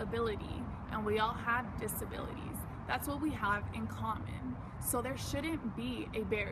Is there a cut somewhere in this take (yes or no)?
no